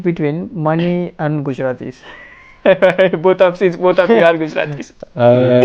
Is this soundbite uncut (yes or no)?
yes